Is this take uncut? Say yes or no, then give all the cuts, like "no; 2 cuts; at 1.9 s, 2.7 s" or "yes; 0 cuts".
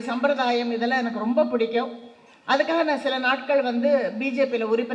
yes; 0 cuts